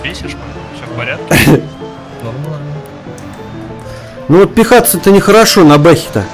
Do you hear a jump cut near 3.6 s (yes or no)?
yes